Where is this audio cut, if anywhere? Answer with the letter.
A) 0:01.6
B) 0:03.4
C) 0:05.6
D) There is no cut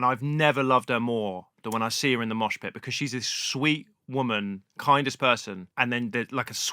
C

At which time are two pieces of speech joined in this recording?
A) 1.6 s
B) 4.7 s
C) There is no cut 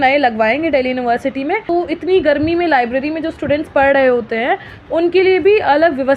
A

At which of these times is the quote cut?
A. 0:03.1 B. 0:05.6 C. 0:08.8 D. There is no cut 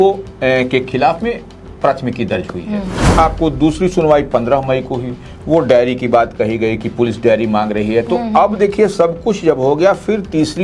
A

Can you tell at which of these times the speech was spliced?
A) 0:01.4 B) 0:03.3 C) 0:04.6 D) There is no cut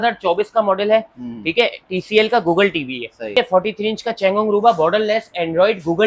B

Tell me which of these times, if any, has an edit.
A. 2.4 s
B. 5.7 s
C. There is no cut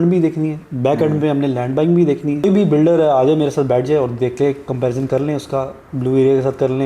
A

